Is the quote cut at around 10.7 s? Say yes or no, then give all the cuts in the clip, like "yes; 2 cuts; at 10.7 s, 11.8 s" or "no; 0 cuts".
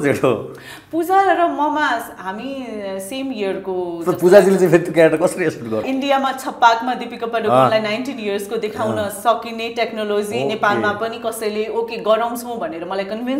no; 1 cut; at 5.8 s